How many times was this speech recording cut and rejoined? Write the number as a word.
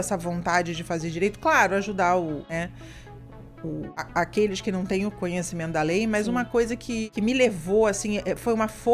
three